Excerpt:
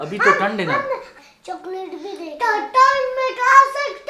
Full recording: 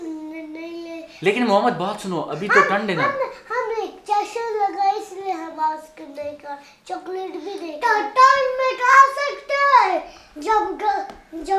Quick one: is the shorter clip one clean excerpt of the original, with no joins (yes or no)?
no